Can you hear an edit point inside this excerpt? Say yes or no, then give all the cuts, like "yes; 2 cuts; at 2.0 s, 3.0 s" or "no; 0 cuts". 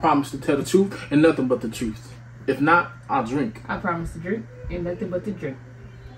no; 0 cuts